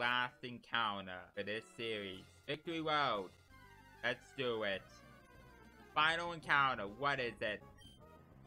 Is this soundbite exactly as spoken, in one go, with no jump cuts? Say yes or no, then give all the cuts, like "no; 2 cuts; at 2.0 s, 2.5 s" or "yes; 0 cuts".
no; 3 cuts; at 1.2 s, 2.6 s, 7.6 s